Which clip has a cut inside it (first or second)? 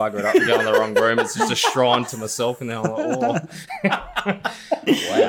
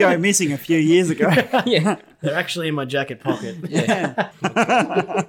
second